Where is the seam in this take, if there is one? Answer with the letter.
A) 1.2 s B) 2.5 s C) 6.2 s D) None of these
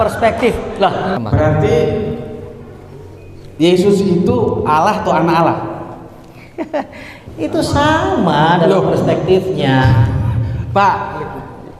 A